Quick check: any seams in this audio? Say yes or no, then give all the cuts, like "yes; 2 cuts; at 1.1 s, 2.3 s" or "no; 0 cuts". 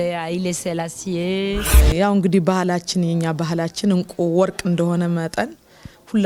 yes; 1 cut; at 1.7 s